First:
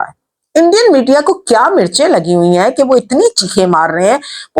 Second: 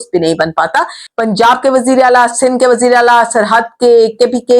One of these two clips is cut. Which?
second; 1 cut; at 1.0 s

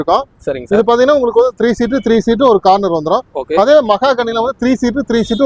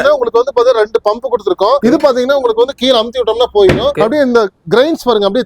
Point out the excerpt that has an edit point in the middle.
second; 2 cuts; at 1.8 s, 3.9 s

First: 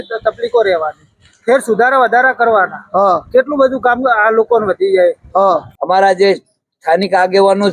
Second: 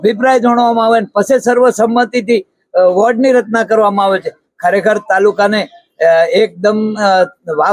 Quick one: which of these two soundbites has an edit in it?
first; 1 cut; at 5.7 s

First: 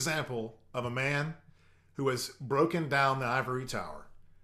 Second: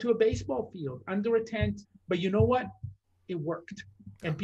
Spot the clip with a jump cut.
second; 1 cut; at 1.9 s

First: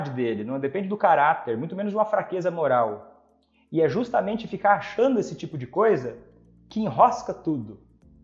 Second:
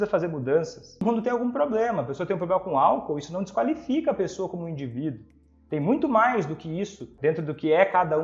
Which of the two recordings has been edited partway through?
second; 2 cuts; at 1.0 s, 7.1 s

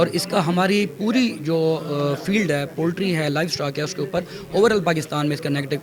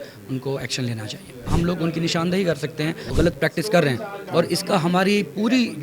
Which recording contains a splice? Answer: second; 2 cuts; at 1.5 s, 3.1 s

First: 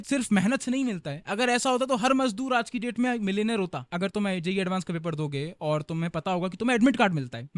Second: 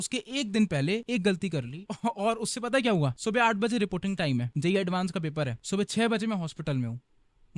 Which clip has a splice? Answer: first; 1 cut; at 3.8 s

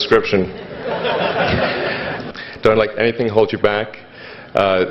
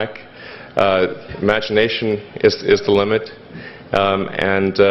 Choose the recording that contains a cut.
first; 1 cut; at 2.2 s

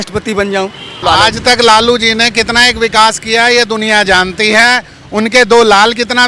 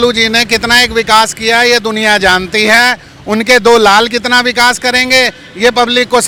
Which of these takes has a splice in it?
first; 1 cut; at 0.9 s

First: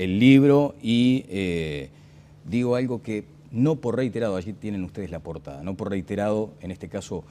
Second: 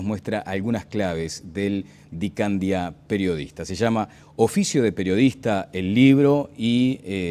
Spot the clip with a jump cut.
first; 1 cut; at 4.5 s

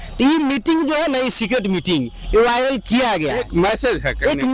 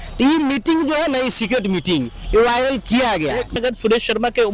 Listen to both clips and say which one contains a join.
second; 1 cut; at 3.5 s

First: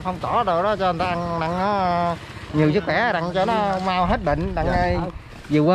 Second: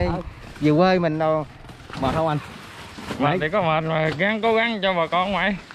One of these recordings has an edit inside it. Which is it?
second; 1 cut; at 1.9 s

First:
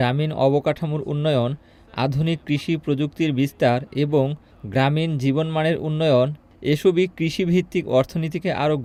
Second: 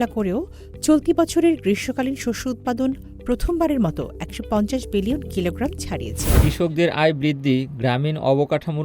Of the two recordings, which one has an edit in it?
second; 1 cut; at 6.4 s

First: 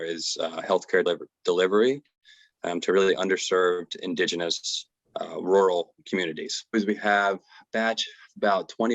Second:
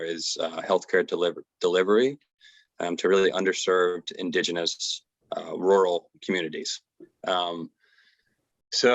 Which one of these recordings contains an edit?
first; 2 cuts; at 1.0 s, 6.7 s

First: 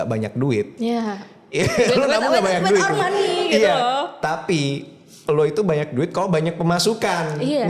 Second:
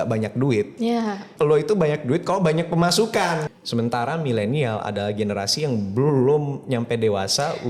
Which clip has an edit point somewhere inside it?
second; 2 cuts; at 1.2 s, 3.4 s

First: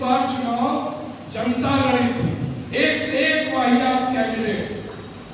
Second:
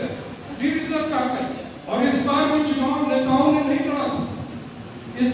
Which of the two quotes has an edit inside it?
second; 1 cut; at 1.7 s

